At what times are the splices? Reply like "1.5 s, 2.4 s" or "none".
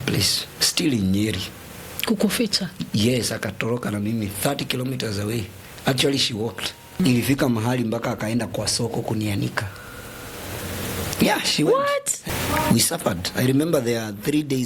7.0 s, 12.2 s